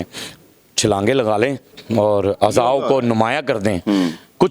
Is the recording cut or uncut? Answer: cut